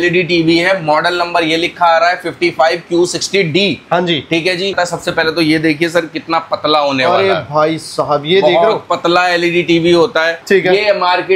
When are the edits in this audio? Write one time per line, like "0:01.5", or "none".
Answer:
0:04.7
0:10.4